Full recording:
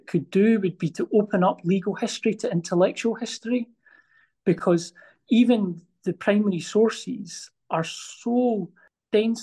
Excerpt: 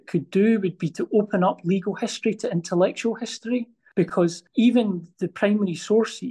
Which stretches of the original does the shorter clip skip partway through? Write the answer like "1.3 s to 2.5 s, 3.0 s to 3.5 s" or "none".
4.2 s to 5.0 s, 5.8 s to 6.0 s